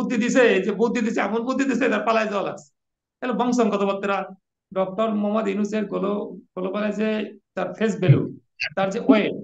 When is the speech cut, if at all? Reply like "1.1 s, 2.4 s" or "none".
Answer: 4.4 s